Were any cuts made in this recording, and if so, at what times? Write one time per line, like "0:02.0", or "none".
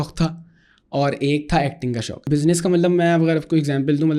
0:02.2